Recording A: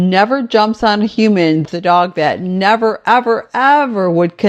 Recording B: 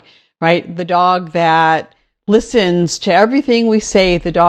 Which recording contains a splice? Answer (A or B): A